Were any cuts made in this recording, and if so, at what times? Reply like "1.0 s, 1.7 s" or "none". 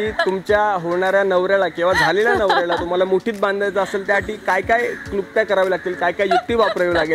none